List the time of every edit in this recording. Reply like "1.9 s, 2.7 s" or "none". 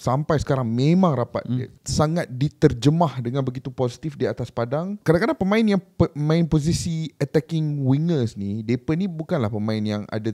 1.7 s, 5.0 s